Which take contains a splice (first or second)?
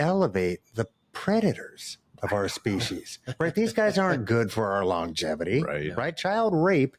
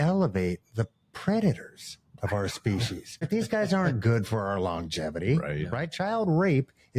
second